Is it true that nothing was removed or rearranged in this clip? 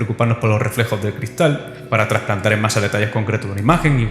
no; 1 cut; at 1.8 s

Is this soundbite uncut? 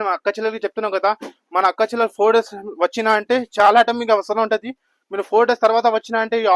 yes; 0 cuts

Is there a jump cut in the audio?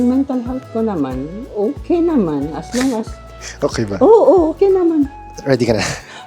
yes; 2 cuts; at 1.4 s, 5.2 s

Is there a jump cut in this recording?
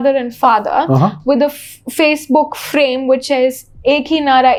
no; 0 cuts

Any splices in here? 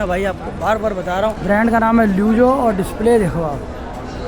yes; 1 cut; at 1.4 s

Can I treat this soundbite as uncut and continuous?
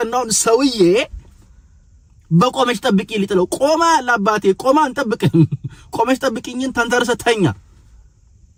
yes; 0 cuts

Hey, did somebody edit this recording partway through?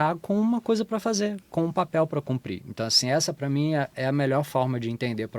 no; 0 cuts

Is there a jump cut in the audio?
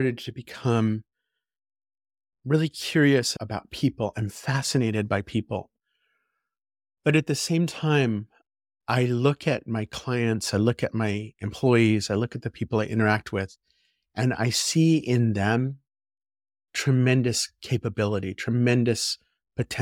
no; 0 cuts

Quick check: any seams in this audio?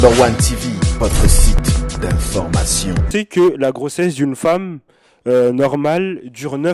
yes; 1 cut; at 3.1 s

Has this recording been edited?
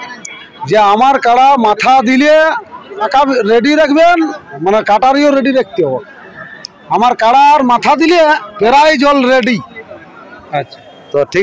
yes; 4 cuts; at 3.1 s, 4.4 s, 9.0 s, 10.4 s

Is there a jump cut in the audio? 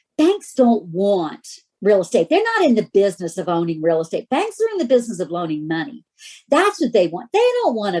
no; 0 cuts

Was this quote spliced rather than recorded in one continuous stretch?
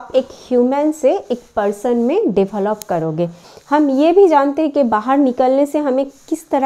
yes; 1 cut; at 3.4 s

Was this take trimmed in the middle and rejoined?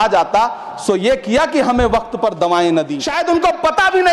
yes; 1 cut; at 3.0 s

